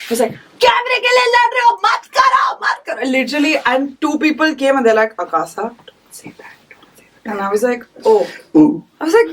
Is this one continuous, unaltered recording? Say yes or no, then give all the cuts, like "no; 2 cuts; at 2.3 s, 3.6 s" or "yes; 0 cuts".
yes; 0 cuts